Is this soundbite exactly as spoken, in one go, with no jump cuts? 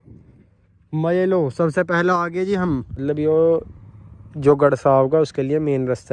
no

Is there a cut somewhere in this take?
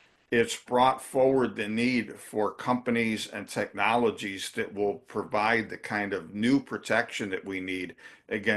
no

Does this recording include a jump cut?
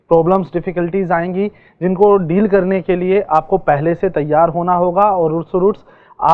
no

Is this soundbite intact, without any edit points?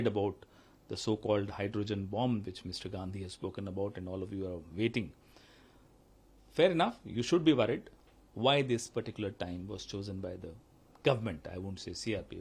no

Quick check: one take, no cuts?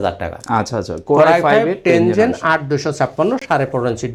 yes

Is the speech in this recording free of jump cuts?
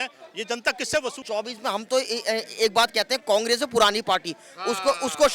no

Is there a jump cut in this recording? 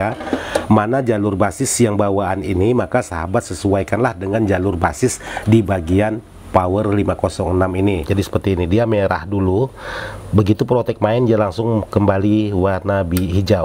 yes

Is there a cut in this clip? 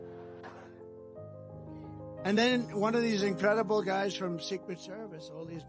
yes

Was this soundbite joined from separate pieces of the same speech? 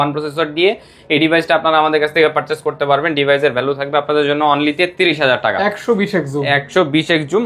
no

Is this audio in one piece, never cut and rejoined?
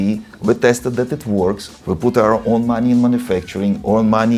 yes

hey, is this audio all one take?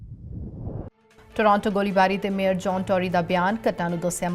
no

